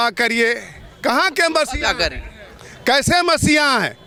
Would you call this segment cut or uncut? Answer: uncut